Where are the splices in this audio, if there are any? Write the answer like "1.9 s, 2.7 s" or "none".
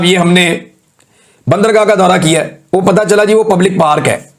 none